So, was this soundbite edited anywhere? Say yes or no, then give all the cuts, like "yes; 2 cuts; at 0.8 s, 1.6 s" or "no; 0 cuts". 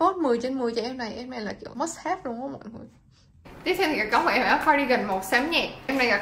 no; 0 cuts